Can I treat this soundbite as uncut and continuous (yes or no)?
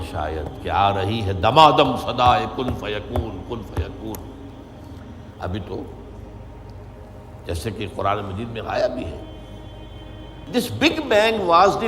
no